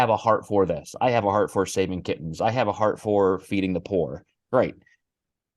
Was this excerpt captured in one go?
yes; 0 cuts

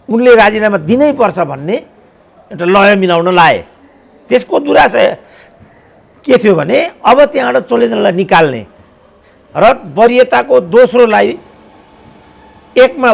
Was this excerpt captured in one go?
yes; 0 cuts

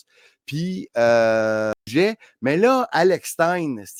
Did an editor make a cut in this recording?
no; 0 cuts

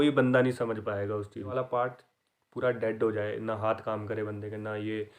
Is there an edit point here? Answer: yes; 1 cut; at 1.5 s

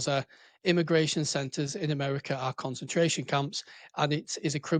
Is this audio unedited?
yes; 0 cuts

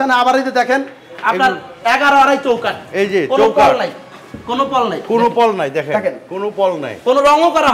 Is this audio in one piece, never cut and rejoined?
yes; 0 cuts

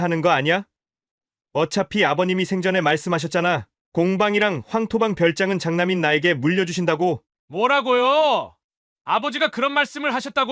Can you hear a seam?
yes; 1 cut; at 7.3 s

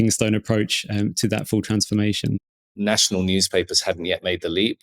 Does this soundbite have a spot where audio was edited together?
yes; 1 cut; at 2.4 s

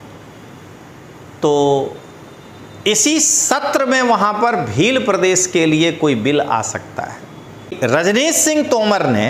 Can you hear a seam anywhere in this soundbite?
yes; 1 cut; at 7.8 s

